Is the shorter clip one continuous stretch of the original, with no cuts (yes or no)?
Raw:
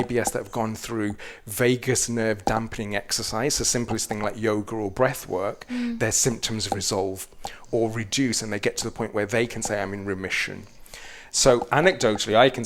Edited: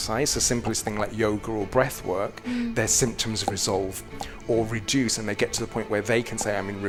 yes